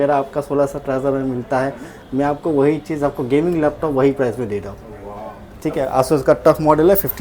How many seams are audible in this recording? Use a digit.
0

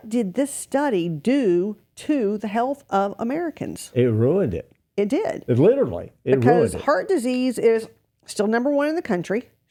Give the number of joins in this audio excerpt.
0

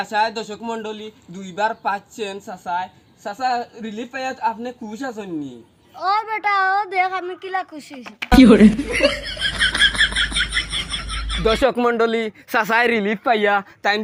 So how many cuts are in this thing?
0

